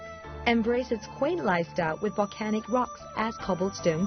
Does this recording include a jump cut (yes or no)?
no